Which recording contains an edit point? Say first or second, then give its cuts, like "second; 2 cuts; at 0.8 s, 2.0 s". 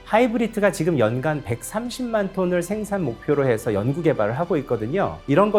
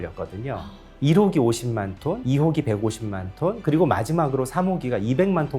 second; 1 cut; at 2.2 s